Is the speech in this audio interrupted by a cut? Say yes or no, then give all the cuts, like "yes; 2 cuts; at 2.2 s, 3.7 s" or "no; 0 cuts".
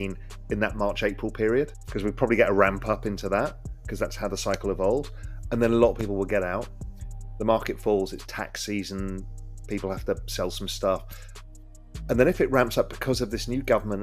yes; 1 cut; at 1.8 s